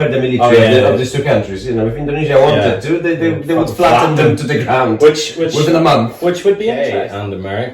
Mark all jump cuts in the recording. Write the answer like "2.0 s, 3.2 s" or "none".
6.8 s